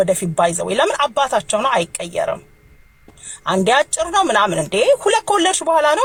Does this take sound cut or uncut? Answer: uncut